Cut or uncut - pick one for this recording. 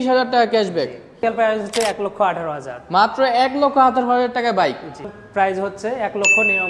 cut